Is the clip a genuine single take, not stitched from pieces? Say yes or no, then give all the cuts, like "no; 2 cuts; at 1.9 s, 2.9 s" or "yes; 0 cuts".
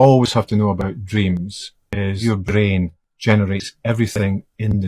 no; 1 cut; at 2.2 s